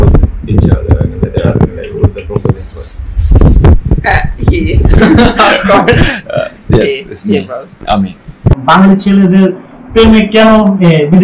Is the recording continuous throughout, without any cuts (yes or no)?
no